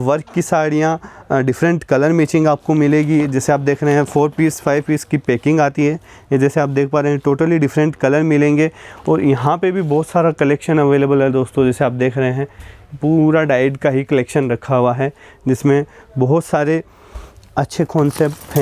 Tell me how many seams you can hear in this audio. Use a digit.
0